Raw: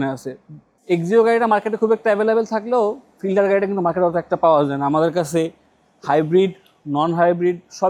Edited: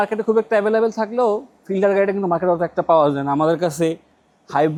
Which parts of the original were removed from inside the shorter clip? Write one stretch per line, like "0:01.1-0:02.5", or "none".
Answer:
none